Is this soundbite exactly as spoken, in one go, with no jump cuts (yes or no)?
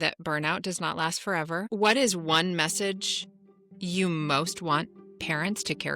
no